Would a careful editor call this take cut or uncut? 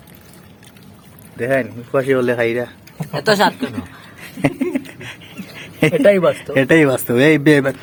uncut